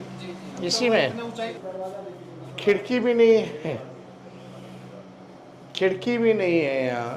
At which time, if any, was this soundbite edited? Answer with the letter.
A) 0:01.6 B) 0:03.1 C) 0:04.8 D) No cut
A